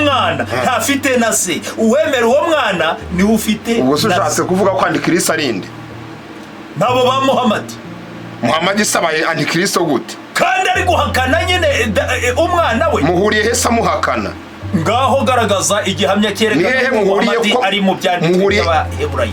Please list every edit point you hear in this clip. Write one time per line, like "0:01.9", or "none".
none